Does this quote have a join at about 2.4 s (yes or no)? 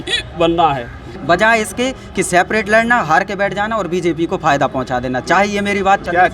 no